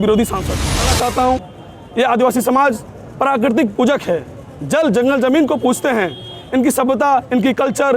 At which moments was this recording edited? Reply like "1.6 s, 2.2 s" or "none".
0.9 s